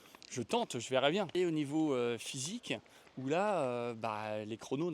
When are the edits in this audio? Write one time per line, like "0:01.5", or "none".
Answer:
0:01.3